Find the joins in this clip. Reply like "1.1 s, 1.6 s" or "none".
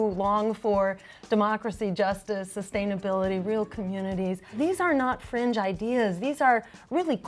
4.6 s